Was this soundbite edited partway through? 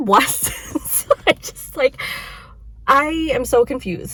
no; 0 cuts

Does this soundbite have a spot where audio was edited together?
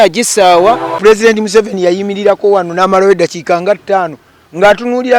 yes; 1 cut; at 1.0 s

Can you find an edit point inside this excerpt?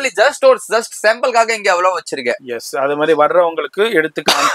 no; 0 cuts

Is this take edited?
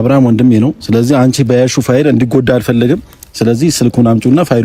no; 0 cuts

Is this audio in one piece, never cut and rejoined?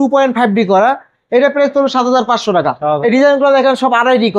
yes; 0 cuts

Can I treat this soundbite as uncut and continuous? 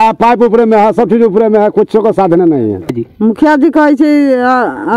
no; 1 cut; at 3.0 s

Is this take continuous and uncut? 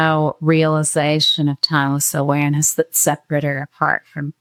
yes; 0 cuts

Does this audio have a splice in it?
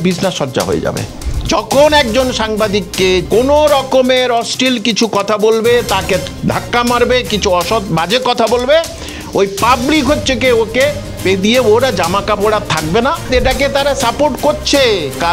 yes; 4 cuts; at 1.1 s, 3.2 s, 6.4 s, 13.3 s

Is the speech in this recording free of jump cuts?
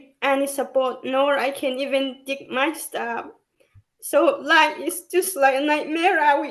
yes; 0 cuts

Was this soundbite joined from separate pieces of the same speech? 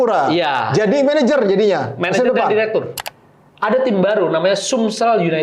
yes; 1 cut; at 3.0 s

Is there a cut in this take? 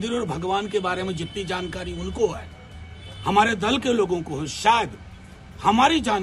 no; 0 cuts

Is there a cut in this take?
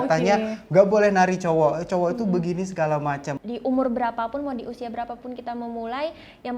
yes; 1 cut; at 3.3 s

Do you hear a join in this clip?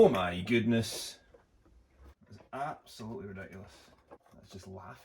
yes; 1 cut; at 2.2 s

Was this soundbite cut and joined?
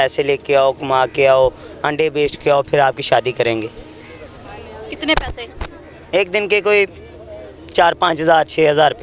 no; 0 cuts

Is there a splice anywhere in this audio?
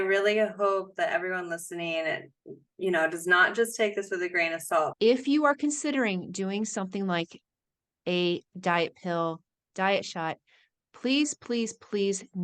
yes; 1 cut; at 4.9 s

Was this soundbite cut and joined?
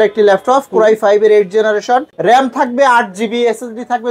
yes; 1 cut; at 2.1 s

